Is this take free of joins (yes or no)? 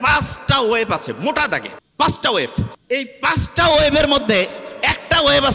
no